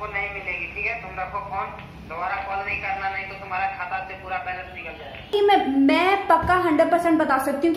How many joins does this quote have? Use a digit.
1